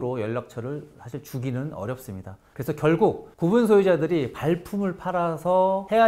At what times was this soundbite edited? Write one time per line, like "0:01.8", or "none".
none